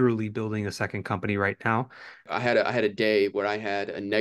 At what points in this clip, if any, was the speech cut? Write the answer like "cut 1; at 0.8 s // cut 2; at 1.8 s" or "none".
cut 1; at 2.3 s